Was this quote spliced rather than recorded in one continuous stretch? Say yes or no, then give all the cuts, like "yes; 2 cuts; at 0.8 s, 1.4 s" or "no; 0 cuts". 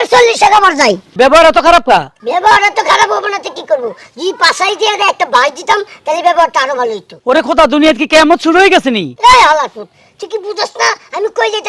yes; 4 cuts; at 1.1 s, 2.2 s, 7.1 s, 9.1 s